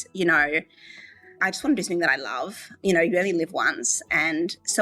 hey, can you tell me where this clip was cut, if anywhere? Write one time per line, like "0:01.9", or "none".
0:01.4
0:02.7